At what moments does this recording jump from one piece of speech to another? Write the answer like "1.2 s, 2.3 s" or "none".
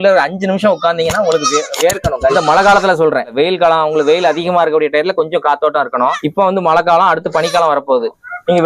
2.3 s, 3.3 s